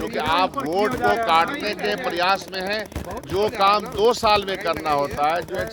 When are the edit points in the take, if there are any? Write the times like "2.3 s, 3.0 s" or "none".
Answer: none